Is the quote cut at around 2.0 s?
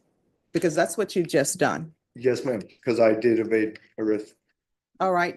no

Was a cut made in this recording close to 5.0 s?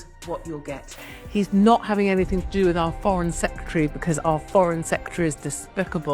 no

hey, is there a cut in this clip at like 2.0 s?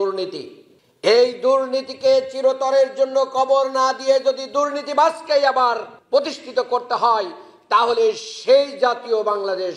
no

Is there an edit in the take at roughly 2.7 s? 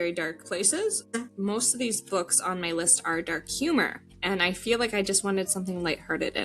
no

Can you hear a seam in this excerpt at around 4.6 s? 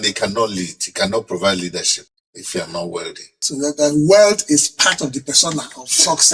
no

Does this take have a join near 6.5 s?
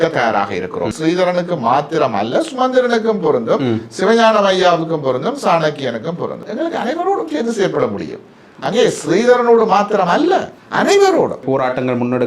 yes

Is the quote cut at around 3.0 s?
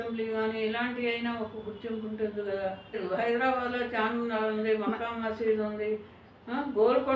yes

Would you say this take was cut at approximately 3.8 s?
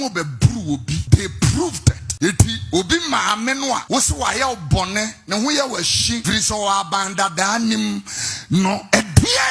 yes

